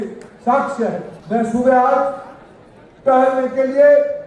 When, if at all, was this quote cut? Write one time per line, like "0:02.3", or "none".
0:01.1